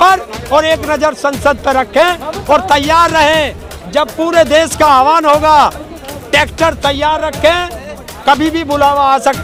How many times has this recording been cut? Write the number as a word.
zero